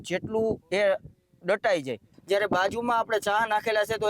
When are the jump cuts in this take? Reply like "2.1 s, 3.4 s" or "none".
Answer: 2.1 s